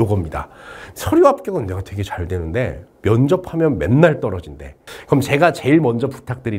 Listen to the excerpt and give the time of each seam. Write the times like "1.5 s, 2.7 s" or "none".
4.9 s